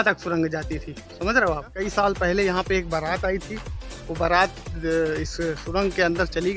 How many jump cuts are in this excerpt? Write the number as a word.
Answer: one